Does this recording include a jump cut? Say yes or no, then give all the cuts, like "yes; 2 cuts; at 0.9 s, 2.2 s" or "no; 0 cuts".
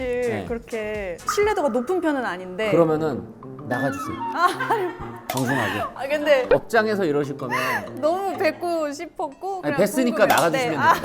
yes; 1 cut; at 6.5 s